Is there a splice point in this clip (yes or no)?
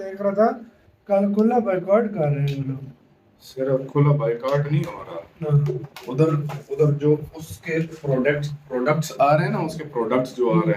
no